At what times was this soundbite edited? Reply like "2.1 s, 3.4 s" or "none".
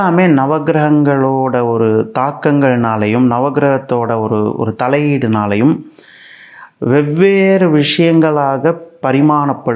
none